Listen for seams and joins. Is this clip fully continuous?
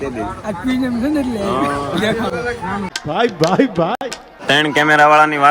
yes; 0 cuts

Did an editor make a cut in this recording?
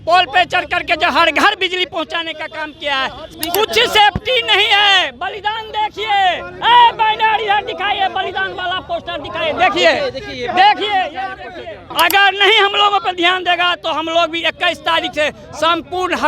yes; 2 cuts; at 3.3 s, 11.8 s

